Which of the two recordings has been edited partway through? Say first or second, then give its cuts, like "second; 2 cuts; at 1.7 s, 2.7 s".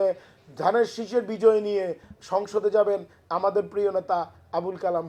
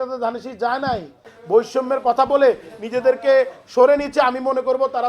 second; 1 cut; at 1.3 s